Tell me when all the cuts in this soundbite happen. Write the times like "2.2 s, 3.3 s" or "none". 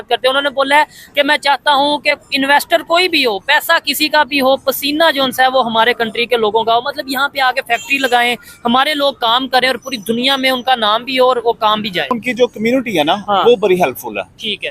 12.2 s